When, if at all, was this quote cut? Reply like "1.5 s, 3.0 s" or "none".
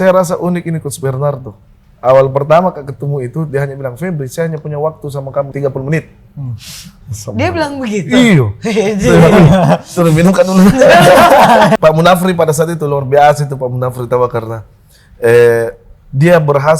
5.5 s, 11.8 s